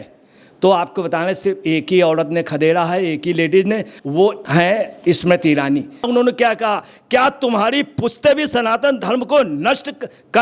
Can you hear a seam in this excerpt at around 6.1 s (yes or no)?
yes